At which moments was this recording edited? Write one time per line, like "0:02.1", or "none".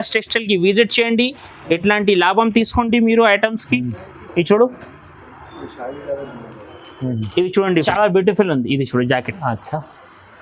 0:07.8